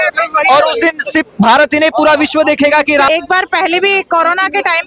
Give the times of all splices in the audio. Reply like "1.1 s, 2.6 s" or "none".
3.1 s